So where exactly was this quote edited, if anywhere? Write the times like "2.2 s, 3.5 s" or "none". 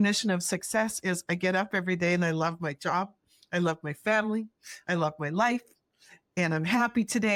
none